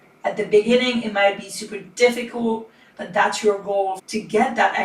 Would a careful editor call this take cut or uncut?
uncut